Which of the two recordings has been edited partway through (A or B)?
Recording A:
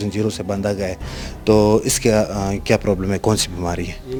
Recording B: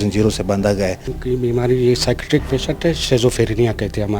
B